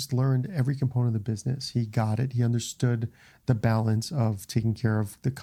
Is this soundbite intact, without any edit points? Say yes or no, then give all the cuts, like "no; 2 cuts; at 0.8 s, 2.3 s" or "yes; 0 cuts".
yes; 0 cuts